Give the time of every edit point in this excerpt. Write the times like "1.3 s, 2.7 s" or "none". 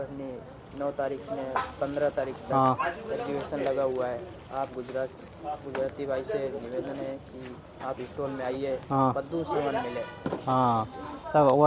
none